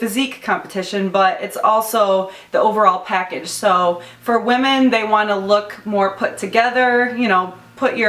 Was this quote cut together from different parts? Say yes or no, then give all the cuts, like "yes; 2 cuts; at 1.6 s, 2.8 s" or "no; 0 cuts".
no; 0 cuts